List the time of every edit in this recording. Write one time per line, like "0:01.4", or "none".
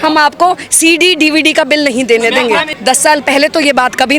0:02.7